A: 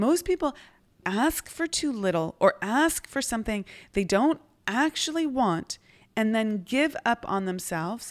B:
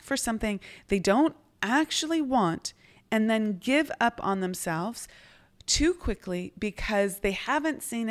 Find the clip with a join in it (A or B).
A